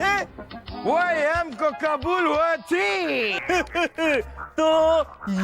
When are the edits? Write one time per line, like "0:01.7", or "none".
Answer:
0:03.3